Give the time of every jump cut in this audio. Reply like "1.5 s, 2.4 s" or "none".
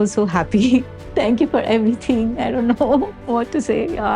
1.1 s